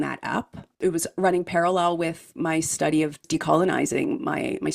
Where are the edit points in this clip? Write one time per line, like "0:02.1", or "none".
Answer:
0:00.8
0:02.4
0:03.2